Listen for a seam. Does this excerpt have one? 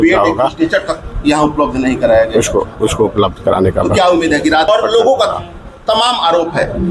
yes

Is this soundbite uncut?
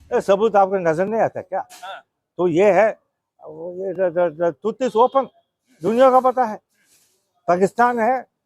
yes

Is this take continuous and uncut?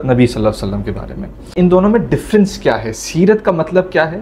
no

